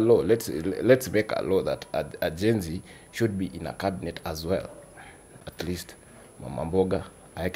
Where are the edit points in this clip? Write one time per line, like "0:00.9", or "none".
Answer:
0:05.3